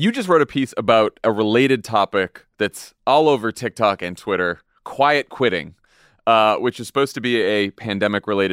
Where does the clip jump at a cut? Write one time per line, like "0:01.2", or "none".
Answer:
0:01.2